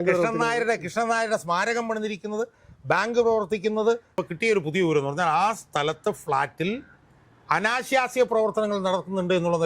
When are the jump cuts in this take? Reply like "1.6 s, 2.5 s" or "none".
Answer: 4.1 s